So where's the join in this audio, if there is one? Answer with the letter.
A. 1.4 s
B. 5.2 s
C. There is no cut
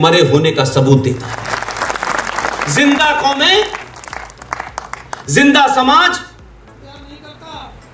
A